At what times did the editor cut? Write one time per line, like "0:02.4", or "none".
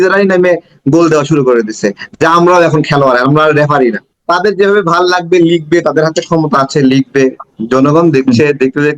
0:04.1